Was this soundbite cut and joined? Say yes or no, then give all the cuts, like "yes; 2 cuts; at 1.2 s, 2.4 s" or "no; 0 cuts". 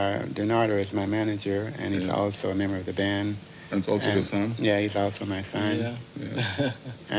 yes; 1 cut; at 3.4 s